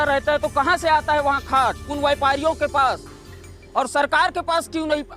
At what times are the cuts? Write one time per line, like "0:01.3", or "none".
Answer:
0:01.9